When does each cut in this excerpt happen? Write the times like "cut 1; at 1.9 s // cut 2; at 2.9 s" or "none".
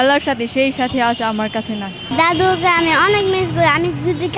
cut 1; at 2.0 s